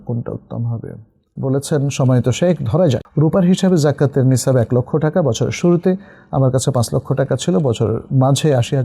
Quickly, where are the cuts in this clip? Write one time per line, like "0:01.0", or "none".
0:01.2
0:03.1